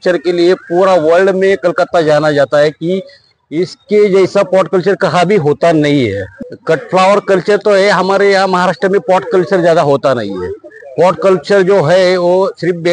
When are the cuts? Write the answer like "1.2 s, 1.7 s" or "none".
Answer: 6.3 s